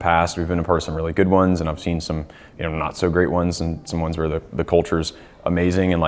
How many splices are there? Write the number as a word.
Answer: zero